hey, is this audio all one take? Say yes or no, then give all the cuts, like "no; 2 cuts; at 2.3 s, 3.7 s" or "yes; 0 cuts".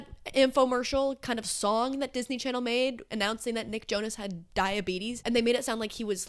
yes; 0 cuts